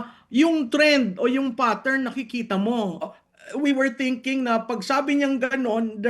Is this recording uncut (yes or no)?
no